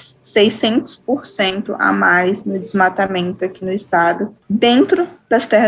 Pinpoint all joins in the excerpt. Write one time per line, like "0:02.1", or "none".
0:04.4